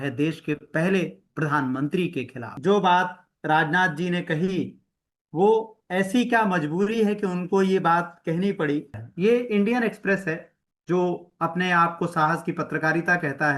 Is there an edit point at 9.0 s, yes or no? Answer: yes